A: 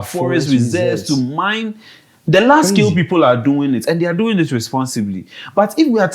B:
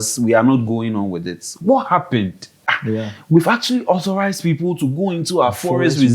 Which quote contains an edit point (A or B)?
B